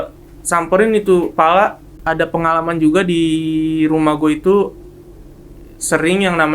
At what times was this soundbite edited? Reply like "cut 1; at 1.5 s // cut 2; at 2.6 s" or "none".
cut 1; at 1.9 s